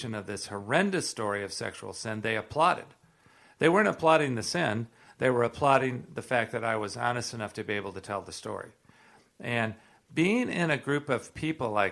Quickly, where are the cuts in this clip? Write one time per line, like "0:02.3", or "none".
none

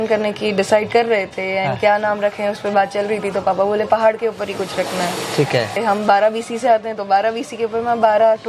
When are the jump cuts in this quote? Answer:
0:05.8

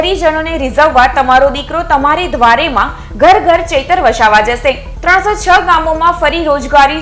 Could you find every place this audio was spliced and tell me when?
none

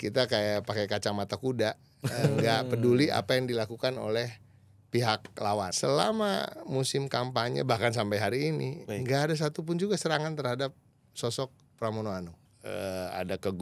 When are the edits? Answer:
0:05.7
0:12.4

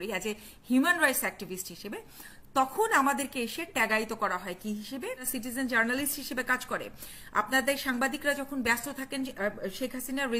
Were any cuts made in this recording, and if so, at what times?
0:05.3

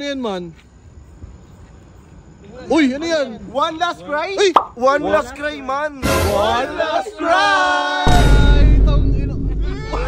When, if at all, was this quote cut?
none

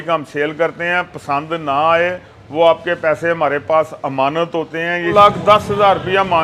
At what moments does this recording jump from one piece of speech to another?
0:05.1

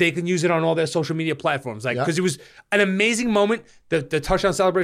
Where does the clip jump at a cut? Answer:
none

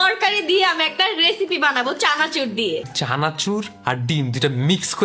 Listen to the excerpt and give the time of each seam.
0:02.9

